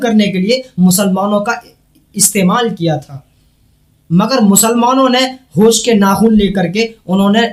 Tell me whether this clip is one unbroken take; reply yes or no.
yes